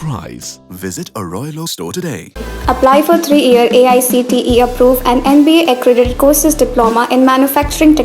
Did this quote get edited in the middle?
no; 0 cuts

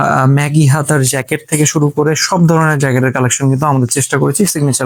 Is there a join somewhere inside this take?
no; 0 cuts

